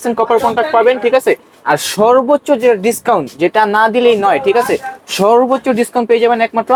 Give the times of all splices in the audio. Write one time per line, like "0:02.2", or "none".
none